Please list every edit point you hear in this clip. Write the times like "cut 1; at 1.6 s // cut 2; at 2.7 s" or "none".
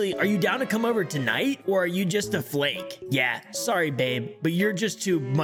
none